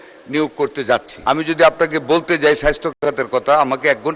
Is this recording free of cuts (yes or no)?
no